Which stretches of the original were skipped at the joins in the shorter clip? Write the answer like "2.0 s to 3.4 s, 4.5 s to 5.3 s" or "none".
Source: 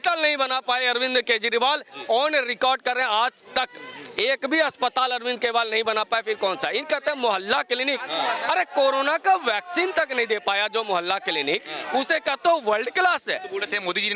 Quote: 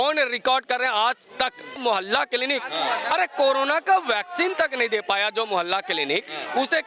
3.9 s to 7.2 s